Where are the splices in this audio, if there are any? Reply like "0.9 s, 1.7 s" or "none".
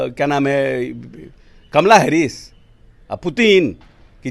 none